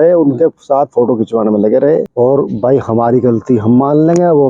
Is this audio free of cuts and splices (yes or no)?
no